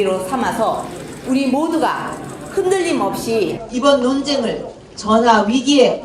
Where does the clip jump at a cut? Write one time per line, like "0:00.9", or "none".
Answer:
0:00.9